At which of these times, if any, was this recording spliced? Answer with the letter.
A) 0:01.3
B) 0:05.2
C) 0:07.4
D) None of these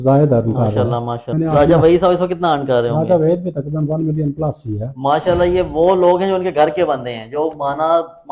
A